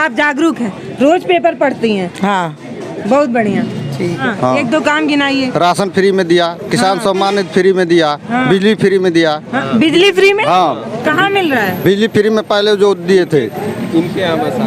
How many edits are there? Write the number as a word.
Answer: one